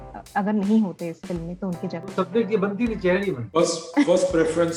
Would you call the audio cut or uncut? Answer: uncut